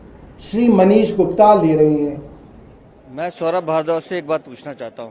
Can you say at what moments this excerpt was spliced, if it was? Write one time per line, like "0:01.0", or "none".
0:03.0